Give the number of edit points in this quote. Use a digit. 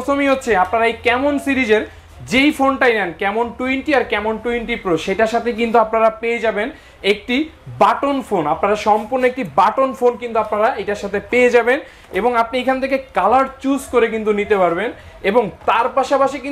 0